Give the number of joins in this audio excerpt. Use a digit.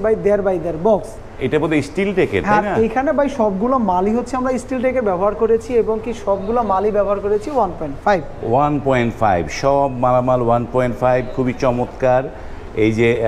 0